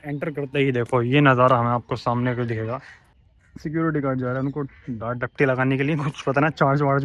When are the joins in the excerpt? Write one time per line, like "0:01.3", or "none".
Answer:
0:03.2